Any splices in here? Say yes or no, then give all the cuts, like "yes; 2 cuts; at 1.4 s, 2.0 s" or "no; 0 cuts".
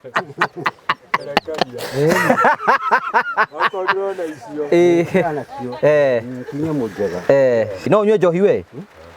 yes; 1 cut; at 7.9 s